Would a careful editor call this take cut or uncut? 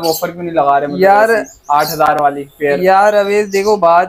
uncut